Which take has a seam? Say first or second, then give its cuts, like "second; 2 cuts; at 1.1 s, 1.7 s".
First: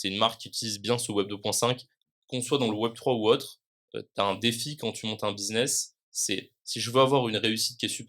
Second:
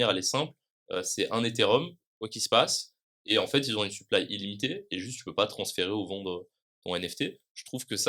first; 1 cut; at 2.0 s